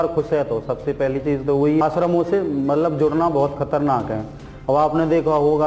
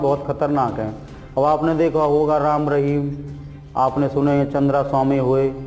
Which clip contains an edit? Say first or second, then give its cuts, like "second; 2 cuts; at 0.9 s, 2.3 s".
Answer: first; 1 cut; at 1.8 s